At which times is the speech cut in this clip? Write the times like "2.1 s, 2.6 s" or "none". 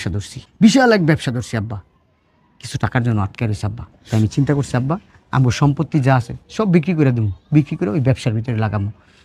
none